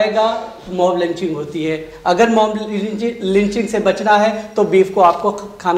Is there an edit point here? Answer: no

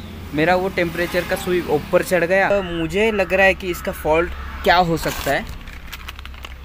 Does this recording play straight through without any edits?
no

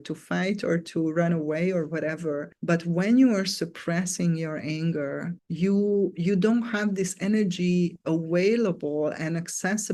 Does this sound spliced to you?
no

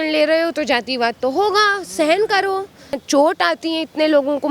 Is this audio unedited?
no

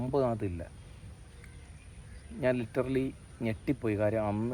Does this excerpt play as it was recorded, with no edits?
yes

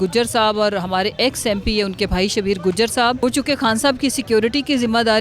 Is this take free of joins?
no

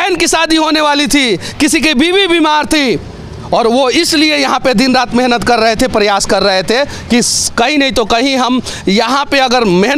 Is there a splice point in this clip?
no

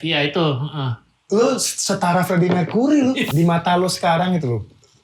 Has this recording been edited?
yes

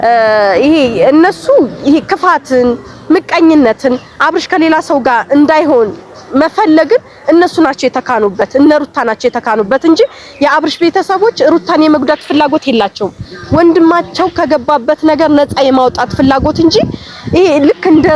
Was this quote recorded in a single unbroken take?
yes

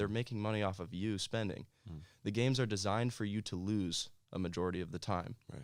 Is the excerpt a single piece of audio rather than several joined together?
yes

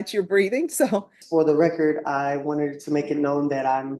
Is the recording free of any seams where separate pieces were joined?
no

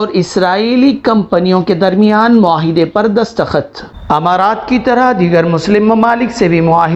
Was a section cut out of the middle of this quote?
yes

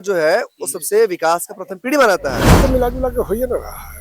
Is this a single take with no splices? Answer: no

